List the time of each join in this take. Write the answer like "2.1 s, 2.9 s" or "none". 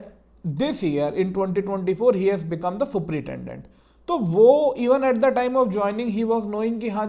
none